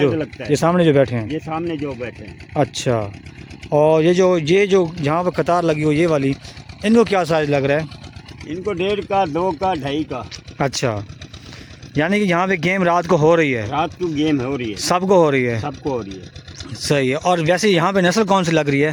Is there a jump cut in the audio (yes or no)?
no